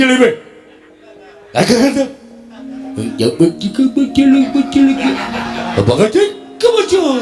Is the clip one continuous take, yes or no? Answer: no